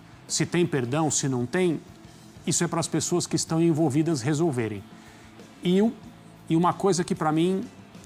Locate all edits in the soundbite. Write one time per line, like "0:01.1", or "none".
none